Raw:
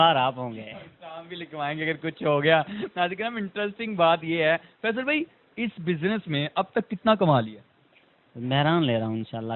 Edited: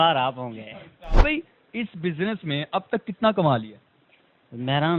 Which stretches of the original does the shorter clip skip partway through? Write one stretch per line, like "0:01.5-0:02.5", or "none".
0:01.2-0:05.0